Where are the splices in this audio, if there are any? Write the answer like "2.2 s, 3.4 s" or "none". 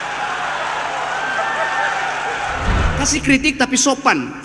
2.9 s